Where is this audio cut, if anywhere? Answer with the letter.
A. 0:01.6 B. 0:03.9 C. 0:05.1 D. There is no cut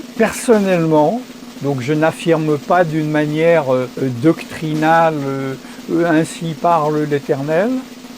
B